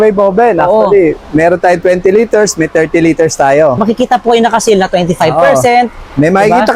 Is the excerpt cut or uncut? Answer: cut